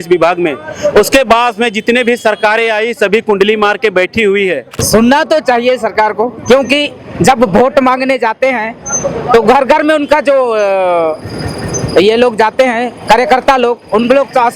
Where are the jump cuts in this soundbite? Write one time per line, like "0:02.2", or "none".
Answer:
0:04.8